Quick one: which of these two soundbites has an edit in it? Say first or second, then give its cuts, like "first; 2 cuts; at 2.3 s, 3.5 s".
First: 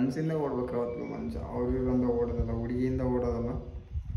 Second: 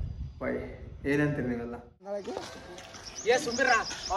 second; 1 cut; at 2.3 s